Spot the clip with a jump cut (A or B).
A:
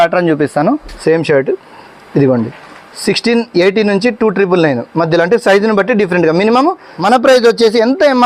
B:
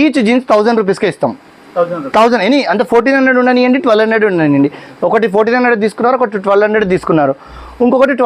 A